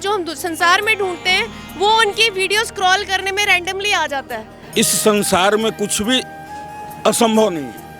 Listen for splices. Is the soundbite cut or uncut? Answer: cut